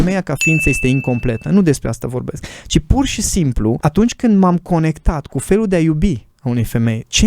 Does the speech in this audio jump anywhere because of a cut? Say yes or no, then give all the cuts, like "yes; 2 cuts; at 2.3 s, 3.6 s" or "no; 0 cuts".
yes; 1 cut; at 3.8 s